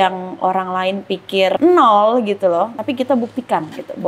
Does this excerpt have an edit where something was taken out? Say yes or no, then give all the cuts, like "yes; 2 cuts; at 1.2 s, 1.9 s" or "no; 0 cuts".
yes; 2 cuts; at 1.6 s, 2.8 s